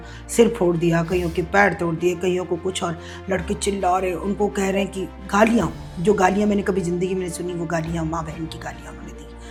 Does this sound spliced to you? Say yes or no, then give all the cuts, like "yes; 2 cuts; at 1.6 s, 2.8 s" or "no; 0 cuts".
no; 0 cuts